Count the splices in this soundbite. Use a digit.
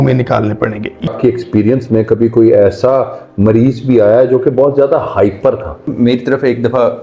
2